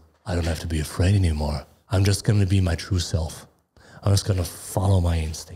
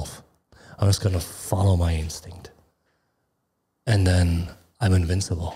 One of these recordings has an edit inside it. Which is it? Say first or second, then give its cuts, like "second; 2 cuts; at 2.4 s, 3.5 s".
first; 1 cut; at 1.7 s